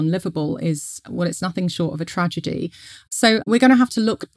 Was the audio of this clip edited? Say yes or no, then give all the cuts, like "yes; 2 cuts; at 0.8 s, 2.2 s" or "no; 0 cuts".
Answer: no; 0 cuts